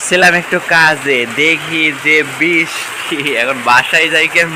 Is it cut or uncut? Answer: uncut